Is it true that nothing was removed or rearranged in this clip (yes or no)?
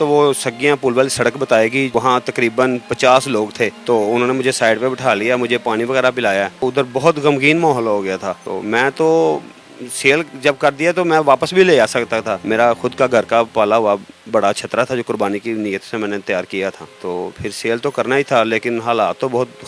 yes